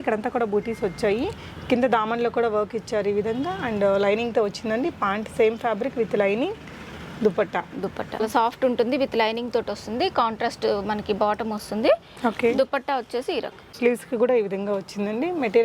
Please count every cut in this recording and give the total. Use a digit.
3